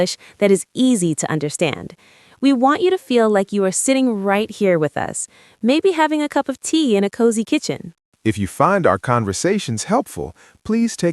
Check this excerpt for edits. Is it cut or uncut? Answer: uncut